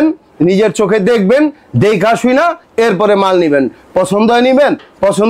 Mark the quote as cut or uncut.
uncut